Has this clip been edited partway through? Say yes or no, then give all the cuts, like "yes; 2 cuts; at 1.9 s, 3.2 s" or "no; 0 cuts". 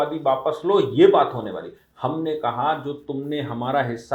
no; 0 cuts